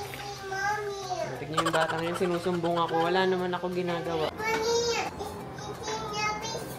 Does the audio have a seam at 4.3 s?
yes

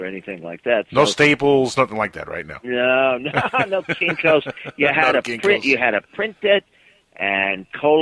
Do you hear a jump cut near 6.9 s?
yes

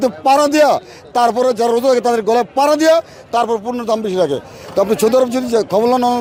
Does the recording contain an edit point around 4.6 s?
no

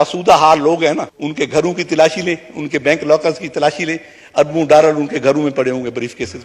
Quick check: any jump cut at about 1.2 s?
yes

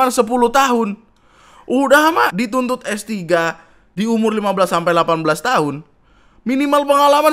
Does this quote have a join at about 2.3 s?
yes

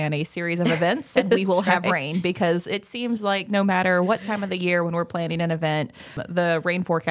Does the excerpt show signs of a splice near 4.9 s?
no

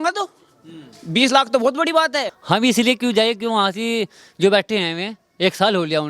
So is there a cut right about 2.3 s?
yes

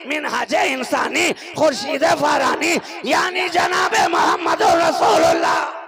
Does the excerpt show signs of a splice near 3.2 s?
no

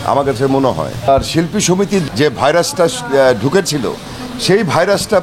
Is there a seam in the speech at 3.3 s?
no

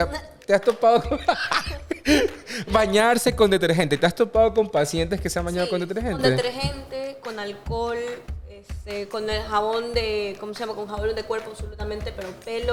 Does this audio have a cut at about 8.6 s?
no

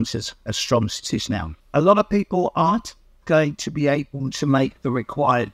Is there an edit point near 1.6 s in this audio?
yes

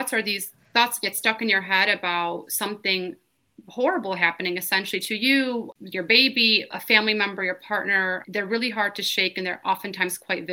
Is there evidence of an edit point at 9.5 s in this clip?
no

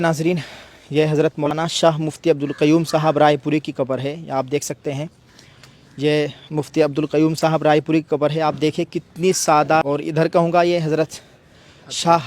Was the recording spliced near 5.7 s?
no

